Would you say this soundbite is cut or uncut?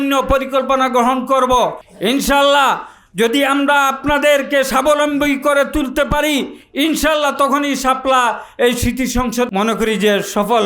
cut